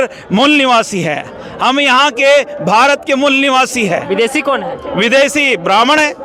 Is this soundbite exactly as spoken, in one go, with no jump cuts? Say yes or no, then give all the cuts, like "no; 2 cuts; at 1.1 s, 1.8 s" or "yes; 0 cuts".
yes; 0 cuts